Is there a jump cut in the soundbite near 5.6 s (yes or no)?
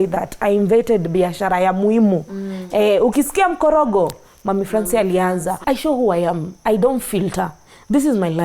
yes